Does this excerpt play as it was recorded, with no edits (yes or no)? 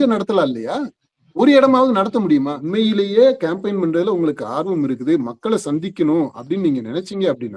no